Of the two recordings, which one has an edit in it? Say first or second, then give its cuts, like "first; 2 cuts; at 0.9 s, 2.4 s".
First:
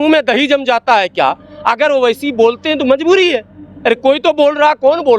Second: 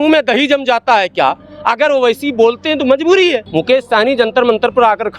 second; 1 cut; at 3.4 s